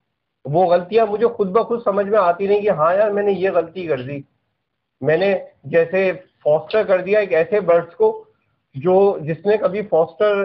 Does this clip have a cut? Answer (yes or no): no